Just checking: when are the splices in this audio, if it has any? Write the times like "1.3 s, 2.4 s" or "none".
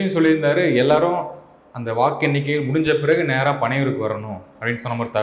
none

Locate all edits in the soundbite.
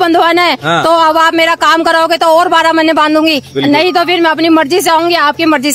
none

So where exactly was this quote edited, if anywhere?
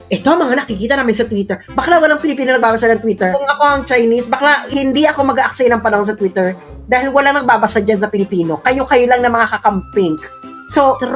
3.3 s, 4.6 s

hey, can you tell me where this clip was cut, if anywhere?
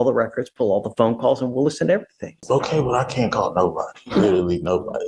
2.4 s

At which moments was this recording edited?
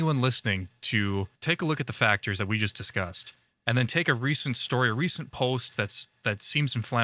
1.3 s

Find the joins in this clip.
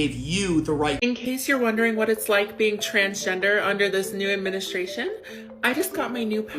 1.0 s

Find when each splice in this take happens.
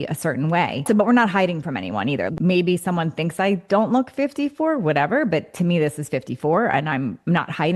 0.8 s, 2.3 s

